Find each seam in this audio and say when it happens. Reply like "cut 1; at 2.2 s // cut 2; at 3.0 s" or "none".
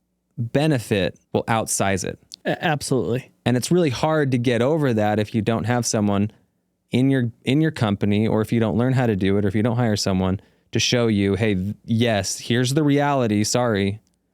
cut 1; at 1.2 s // cut 2; at 2.2 s // cut 3; at 3.3 s